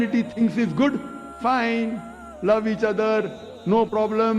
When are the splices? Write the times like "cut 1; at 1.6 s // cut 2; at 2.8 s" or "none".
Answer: cut 1; at 1.2 s